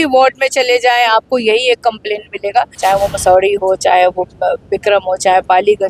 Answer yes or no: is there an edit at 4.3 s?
no